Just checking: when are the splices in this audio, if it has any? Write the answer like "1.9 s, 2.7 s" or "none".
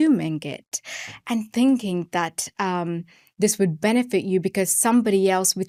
none

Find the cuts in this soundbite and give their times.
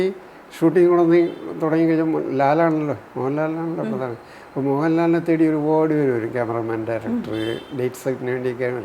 none

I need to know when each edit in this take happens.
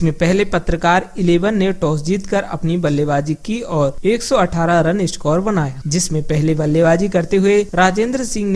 none

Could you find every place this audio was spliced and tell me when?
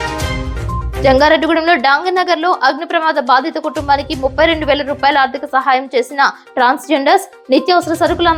none

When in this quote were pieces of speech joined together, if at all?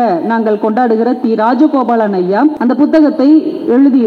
2.6 s

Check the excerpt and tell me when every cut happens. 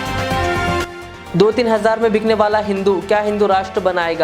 1.0 s

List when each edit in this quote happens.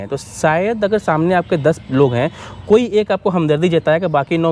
none

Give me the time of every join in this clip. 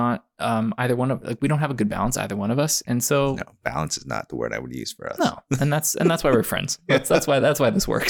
none

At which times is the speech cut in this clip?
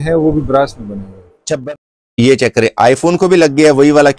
1.6 s

